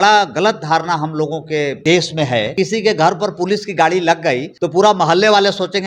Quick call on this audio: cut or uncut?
cut